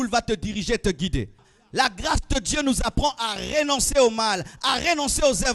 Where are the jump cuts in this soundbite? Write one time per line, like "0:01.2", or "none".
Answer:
0:01.5